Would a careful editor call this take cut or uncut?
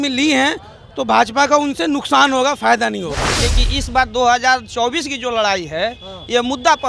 cut